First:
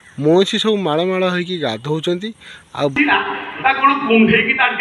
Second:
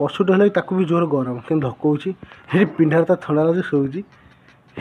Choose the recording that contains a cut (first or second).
first